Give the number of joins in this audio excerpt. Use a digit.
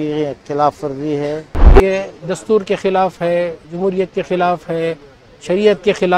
1